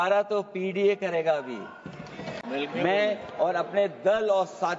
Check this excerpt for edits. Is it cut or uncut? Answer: cut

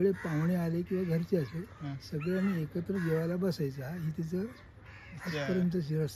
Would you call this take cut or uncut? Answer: uncut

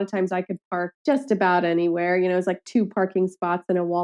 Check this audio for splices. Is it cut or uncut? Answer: cut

